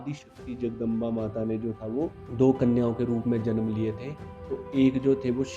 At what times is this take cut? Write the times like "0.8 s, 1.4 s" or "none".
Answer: 2.2 s